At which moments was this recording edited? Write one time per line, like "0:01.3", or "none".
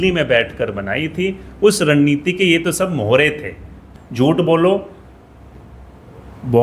0:03.9